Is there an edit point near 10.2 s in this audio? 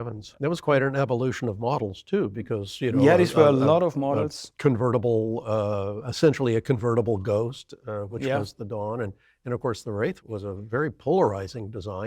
yes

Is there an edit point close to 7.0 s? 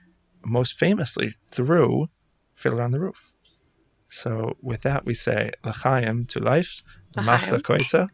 no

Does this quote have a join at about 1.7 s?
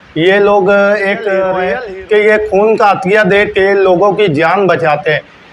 yes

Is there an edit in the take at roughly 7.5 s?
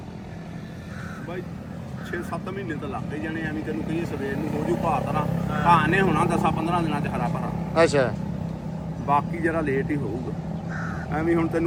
no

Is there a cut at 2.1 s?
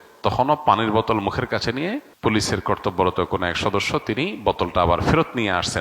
yes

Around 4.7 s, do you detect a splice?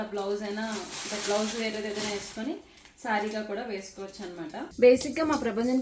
yes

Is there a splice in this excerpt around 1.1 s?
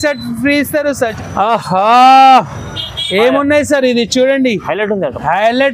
yes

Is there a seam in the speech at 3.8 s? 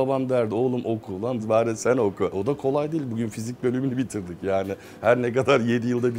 no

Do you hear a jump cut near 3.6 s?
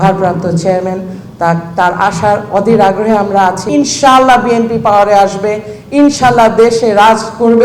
yes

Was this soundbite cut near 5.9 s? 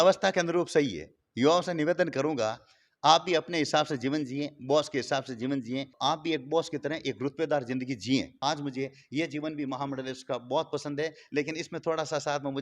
yes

